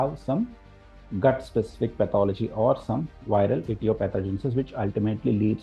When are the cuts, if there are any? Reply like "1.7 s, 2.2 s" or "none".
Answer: none